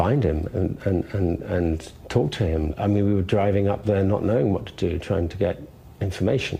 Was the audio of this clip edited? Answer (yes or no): no